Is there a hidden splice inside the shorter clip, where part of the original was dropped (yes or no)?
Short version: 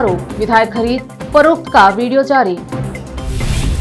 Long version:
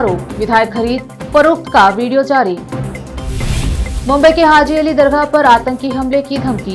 no